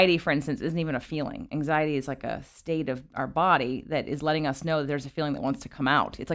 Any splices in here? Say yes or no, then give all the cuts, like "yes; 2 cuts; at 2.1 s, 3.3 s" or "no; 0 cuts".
no; 0 cuts